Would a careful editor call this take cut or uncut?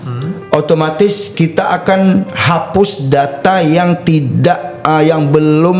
uncut